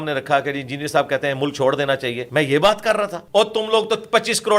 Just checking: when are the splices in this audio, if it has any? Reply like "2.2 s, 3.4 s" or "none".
2.2 s, 3.2 s